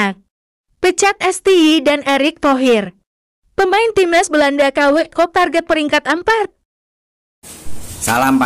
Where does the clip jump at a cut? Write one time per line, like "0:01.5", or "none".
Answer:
none